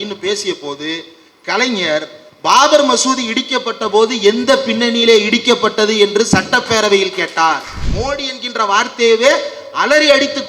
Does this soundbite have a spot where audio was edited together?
yes; 1 cut; at 7.8 s

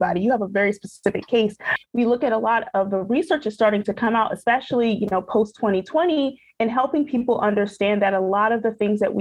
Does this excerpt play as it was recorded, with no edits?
no; 1 cut; at 1.7 s

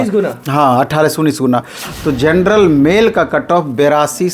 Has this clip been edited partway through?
yes; 1 cut; at 1.9 s

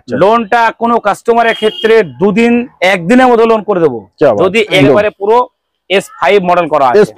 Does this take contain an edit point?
yes; 1 cut; at 4.8 s

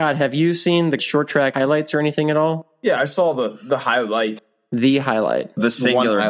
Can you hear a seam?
yes; 3 cuts; at 1.0 s, 2.7 s, 4.5 s

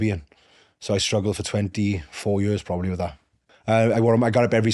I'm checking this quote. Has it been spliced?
yes; 1 cut; at 3.3 s

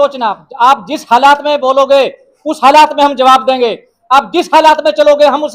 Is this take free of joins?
yes; 0 cuts

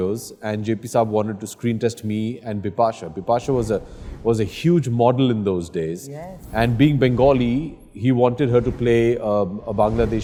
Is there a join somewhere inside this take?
no; 0 cuts

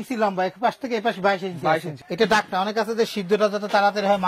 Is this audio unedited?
no; 1 cut; at 2.0 s

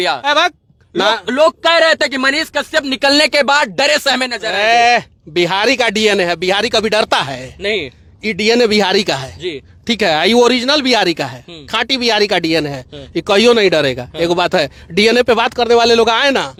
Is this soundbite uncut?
yes; 0 cuts

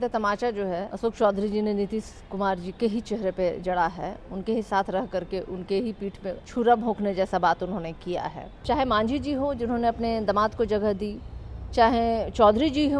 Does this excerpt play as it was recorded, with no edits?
no; 3 cuts; at 0.9 s, 6.4 s, 8.6 s

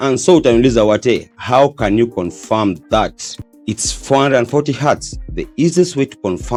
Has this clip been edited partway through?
no; 0 cuts

